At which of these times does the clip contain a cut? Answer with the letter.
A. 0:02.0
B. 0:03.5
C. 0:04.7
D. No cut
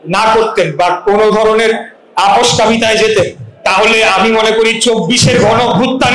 D